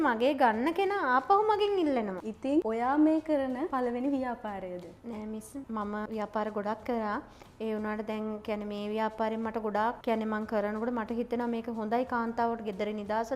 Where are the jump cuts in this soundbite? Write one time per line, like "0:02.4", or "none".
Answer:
0:02.2
0:05.7